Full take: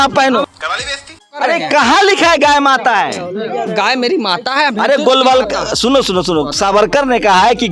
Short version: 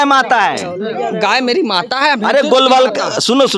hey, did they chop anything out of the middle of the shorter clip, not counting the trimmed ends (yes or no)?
no